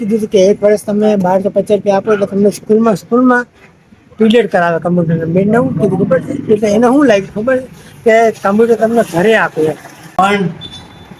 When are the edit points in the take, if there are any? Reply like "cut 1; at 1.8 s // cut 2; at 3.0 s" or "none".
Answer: cut 1; at 10.1 s